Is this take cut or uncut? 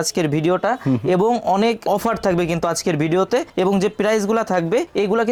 uncut